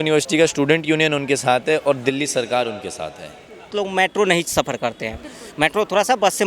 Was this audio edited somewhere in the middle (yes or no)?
yes